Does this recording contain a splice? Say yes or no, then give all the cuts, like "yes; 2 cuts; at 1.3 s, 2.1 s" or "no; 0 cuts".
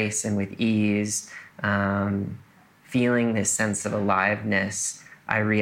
no; 0 cuts